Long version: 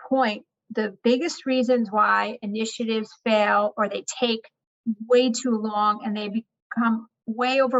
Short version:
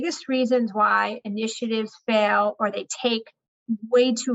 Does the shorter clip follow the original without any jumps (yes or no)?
yes